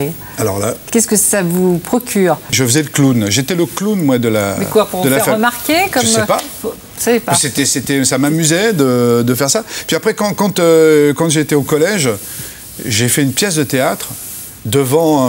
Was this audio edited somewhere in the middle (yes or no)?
yes